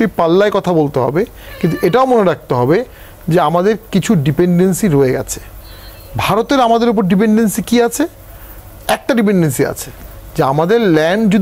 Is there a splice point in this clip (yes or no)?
no